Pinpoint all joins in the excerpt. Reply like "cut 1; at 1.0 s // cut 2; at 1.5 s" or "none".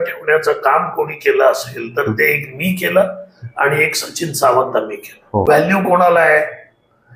cut 1; at 5.4 s